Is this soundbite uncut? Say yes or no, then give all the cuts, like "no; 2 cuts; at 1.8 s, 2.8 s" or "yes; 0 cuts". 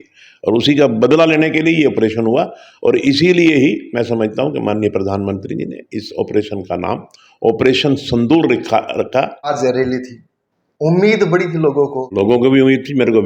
no; 2 cuts; at 9.4 s, 12.0 s